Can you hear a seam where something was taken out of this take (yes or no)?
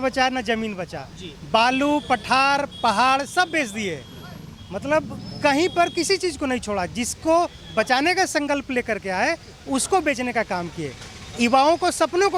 no